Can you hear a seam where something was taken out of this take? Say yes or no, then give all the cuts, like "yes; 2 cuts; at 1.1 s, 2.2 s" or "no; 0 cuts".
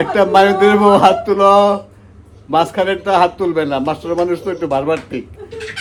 no; 0 cuts